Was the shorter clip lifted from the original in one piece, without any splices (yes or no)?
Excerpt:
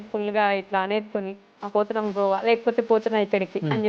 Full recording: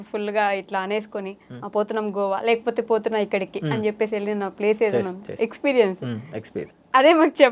yes